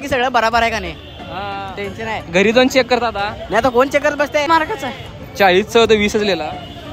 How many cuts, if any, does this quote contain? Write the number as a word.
one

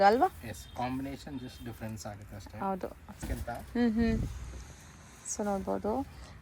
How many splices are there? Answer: one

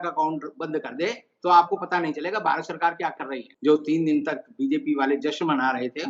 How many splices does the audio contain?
one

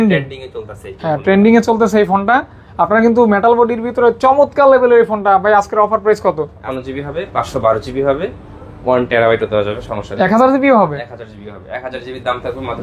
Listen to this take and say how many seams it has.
one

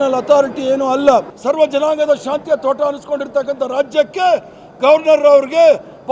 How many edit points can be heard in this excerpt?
one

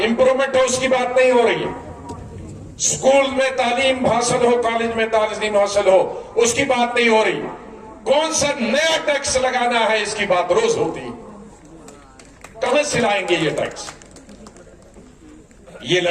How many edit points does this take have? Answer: zero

